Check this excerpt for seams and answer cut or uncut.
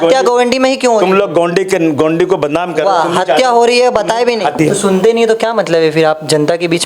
cut